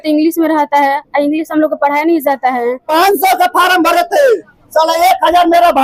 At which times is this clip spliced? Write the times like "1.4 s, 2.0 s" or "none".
2.8 s